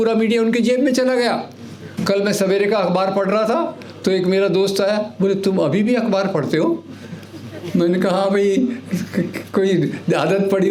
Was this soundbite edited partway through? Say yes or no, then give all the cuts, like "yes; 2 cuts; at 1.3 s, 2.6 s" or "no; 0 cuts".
no; 0 cuts